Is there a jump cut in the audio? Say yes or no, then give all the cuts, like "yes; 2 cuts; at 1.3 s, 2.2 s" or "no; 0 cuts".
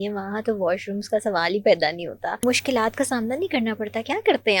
yes; 1 cut; at 2.4 s